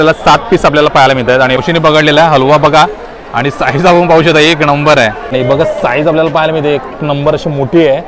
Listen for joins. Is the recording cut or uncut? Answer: cut